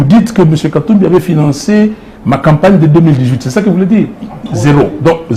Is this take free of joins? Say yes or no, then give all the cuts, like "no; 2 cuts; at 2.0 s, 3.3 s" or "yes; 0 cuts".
yes; 0 cuts